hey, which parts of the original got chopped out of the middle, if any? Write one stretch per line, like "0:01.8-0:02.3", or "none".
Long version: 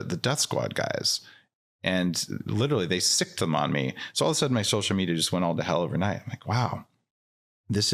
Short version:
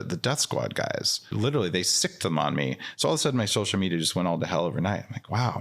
0:01.2-0:02.4

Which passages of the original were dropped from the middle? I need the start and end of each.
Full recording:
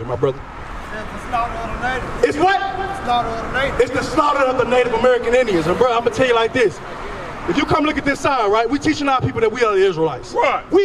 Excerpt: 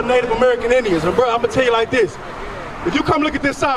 none

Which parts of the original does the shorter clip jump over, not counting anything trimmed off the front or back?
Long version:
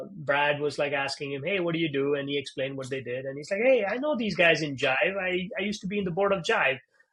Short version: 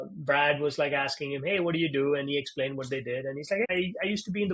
0:03.6-0:05.2

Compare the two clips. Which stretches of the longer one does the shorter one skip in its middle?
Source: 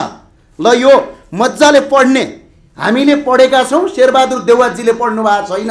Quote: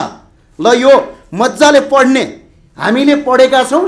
none

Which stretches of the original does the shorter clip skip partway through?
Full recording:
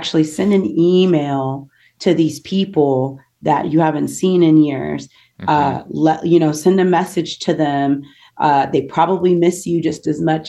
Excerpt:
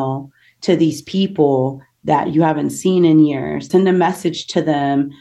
0:05.0-0:06.6

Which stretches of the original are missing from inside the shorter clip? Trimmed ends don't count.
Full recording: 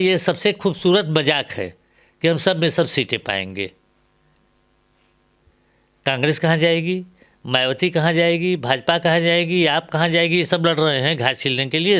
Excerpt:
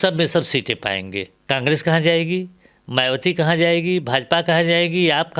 0:03.8-0:05.9

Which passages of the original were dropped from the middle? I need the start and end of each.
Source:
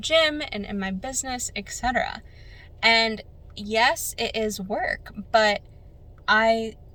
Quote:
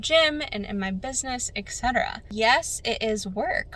0:02.2-0:03.5

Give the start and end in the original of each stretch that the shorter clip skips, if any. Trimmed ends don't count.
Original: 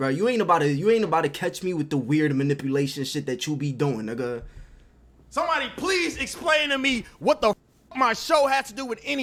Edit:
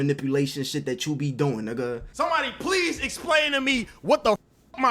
0:04.5-0:05.2

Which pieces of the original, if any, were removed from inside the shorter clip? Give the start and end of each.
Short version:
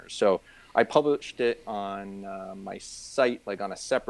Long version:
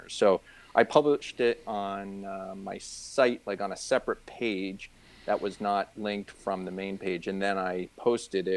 none

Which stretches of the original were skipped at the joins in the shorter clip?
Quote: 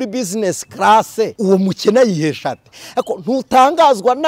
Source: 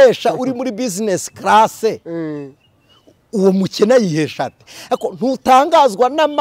0:02.0-0:03.3

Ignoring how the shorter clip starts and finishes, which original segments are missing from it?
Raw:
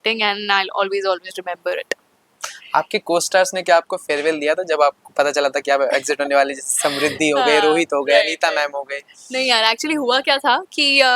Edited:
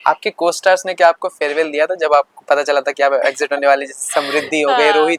none

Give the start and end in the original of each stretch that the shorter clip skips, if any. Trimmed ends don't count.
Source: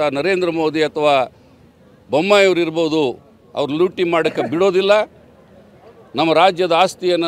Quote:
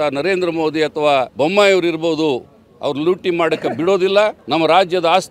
0:01.3-0:02.0
0:05.1-0:06.1

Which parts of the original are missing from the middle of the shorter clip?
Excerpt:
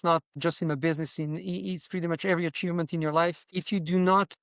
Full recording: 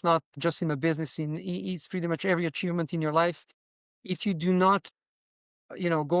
0:03.5-0:04.0

